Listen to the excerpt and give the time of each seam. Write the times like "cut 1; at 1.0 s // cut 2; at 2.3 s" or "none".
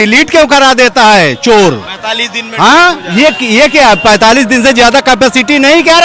none